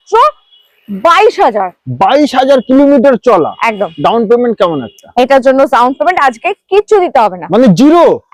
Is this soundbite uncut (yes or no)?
yes